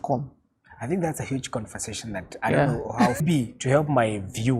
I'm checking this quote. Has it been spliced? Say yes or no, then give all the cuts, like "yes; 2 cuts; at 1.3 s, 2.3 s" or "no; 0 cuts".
yes; 1 cut; at 3.2 s